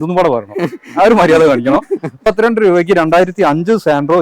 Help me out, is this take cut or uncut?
cut